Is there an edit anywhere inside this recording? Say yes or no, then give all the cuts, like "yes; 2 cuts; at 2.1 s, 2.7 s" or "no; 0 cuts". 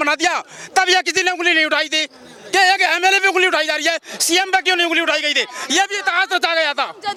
no; 0 cuts